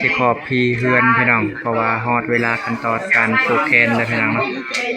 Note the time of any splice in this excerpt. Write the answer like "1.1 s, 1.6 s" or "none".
none